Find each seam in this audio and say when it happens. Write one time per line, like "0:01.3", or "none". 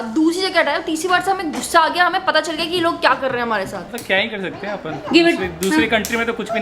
0:03.8